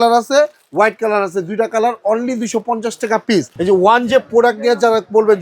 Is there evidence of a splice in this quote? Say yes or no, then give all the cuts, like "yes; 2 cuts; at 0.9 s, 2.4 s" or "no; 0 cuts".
yes; 1 cut; at 3.5 s